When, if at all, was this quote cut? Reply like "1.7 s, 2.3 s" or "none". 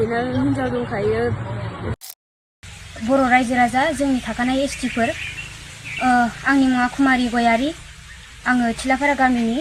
2.3 s

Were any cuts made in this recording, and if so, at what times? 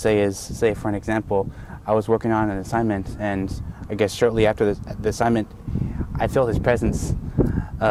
none

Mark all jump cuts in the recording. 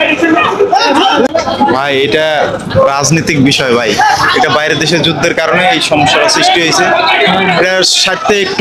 1.3 s

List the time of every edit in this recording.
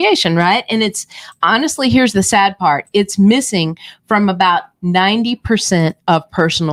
none

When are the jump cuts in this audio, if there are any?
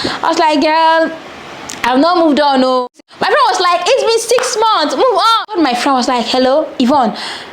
3.2 s, 5.5 s

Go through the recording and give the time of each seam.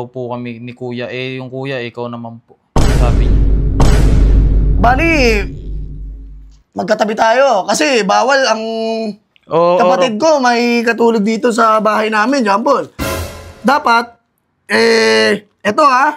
none

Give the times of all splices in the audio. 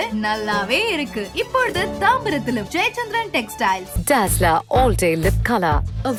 none

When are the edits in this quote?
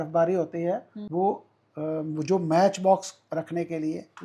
1.0 s

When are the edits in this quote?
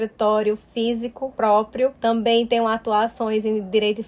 1.2 s, 2.0 s

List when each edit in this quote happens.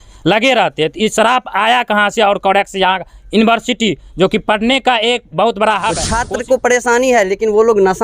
6.1 s

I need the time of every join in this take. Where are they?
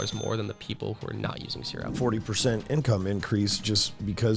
1.9 s

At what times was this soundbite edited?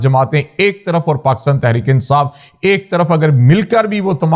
none

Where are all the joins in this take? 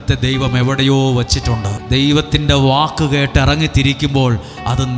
1.8 s

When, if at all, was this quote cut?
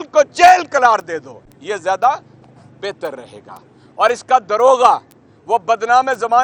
none

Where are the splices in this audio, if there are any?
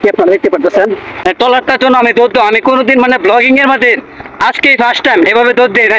none

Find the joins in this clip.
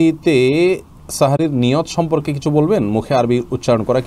none

